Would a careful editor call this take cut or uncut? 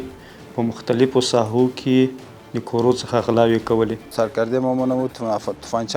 cut